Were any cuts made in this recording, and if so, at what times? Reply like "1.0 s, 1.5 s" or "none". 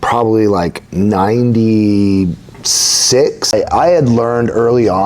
3.5 s